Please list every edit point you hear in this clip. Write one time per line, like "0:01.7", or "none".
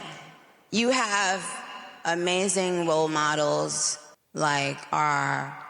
0:04.2